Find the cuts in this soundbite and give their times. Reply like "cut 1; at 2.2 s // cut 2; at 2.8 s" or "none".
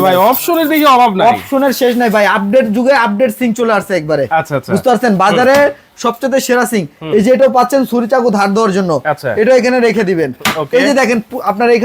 none